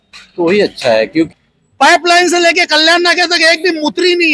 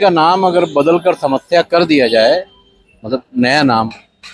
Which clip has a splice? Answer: first; 1 cut; at 1.3 s

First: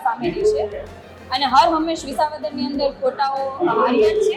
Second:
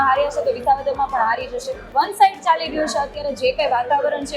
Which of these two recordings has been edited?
second; 1 cut; at 1.8 s

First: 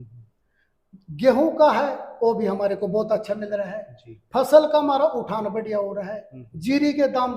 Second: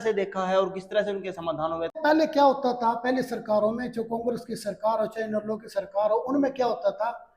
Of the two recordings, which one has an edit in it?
second; 1 cut; at 2.0 s

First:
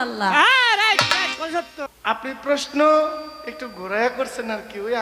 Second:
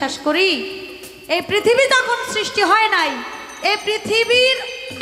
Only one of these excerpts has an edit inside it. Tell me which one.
first; 1 cut; at 1.9 s

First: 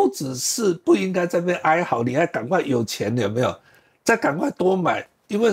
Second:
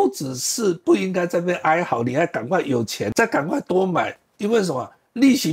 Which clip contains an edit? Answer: second; 1 cut; at 3.1 s

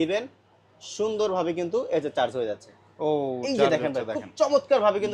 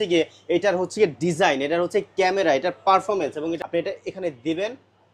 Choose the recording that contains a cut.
second; 1 cut; at 3.6 s

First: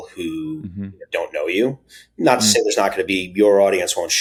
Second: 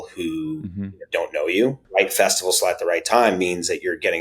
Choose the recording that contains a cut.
second; 1 cut; at 1.8 s

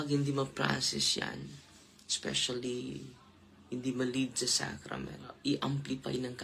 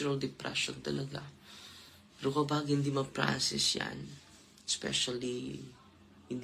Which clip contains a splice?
first; 1 cut; at 5.2 s

